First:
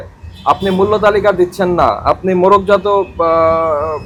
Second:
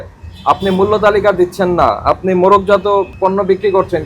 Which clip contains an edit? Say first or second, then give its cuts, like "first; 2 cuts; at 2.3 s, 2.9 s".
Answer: second; 1 cut; at 3.1 s